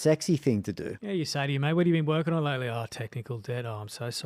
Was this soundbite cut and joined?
yes; 1 cut; at 0.9 s

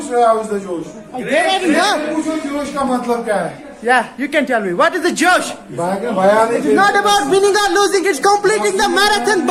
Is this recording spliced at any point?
no; 0 cuts

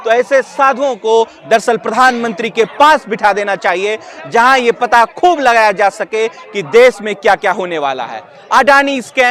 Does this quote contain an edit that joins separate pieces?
no; 0 cuts

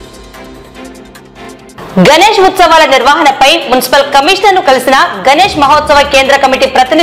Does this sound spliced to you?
yes; 1 cut; at 1.6 s

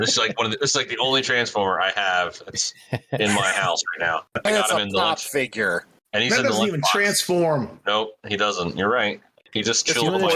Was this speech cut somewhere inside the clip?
yes; 2 cuts; at 4.3 s, 9.3 s

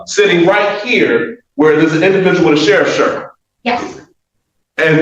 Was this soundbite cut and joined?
no; 0 cuts

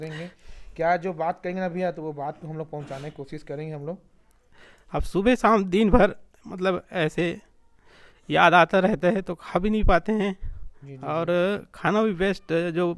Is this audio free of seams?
yes; 0 cuts

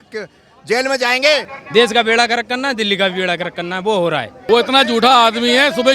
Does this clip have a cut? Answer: yes; 2 cuts; at 1.5 s, 4.3 s

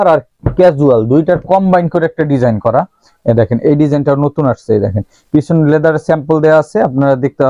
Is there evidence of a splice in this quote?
no; 0 cuts

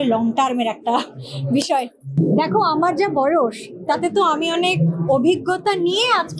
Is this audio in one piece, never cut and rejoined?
no; 1 cut; at 2.1 s

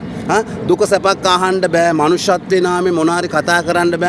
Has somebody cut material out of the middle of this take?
no; 0 cuts

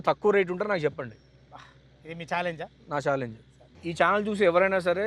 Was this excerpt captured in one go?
no; 1 cut; at 3.8 s

